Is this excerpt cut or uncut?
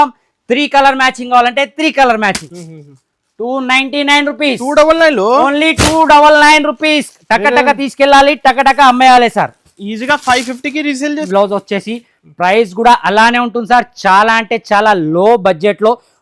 cut